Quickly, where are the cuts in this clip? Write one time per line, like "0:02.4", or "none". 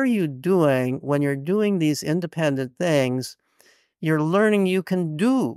none

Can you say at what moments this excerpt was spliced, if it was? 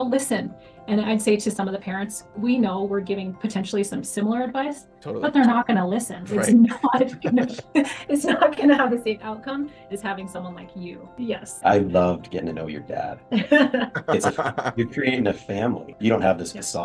0:11.5
0:16.0

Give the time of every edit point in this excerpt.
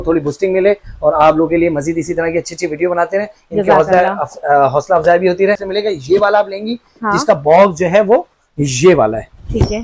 0:05.7

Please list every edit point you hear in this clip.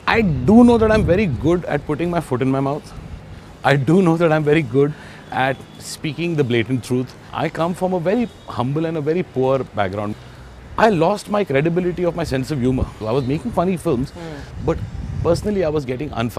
0:07.2
0:10.1
0:12.9

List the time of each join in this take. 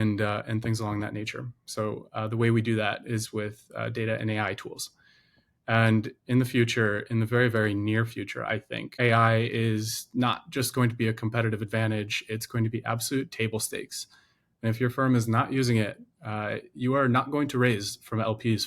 0:08.8

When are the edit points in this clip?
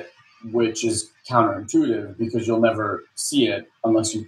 none

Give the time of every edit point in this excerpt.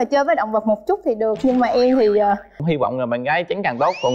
0:02.6

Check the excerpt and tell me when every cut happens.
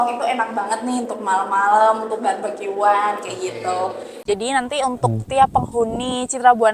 0:04.1

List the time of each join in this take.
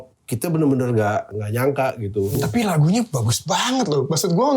0:01.4
0:02.4

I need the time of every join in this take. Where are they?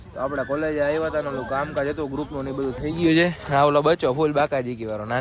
none

